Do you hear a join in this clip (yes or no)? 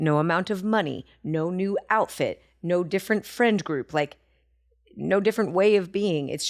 no